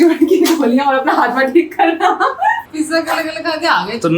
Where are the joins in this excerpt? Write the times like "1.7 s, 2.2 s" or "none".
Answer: 2.7 s